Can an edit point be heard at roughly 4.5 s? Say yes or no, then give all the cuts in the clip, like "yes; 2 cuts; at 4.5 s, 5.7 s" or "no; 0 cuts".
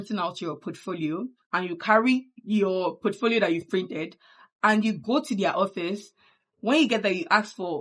no; 2 cuts; at 1.4 s, 2.3 s